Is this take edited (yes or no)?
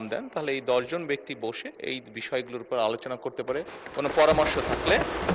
no